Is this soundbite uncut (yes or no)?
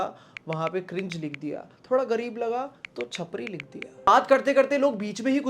no